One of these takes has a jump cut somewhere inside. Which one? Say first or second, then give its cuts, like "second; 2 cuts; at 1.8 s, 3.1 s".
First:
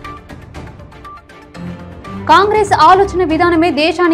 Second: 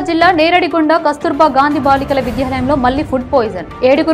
first; 1 cut; at 2.3 s